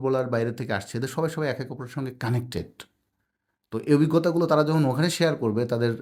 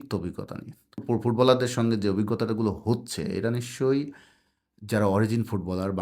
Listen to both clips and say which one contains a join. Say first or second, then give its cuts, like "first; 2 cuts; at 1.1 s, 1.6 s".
second; 1 cut; at 1.0 s